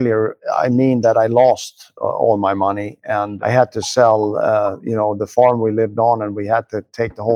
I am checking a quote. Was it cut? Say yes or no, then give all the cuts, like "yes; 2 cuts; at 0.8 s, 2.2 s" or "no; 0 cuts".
yes; 1 cut; at 3.3 s